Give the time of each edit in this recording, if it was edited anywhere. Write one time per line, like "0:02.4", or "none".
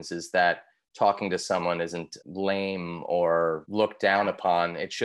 0:02.1
0:03.6